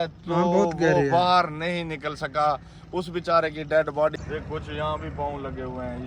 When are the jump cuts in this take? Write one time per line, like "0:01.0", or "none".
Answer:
0:04.2

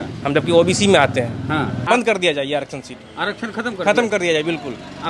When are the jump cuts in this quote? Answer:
0:01.9

